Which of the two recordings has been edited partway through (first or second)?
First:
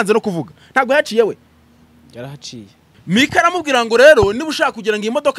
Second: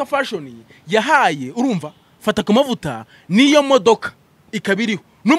first